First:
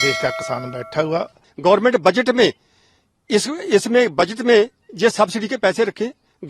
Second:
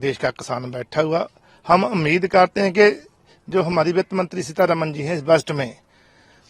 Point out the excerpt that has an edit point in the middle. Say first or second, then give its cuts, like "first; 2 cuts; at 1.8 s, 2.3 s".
first; 1 cut; at 1.4 s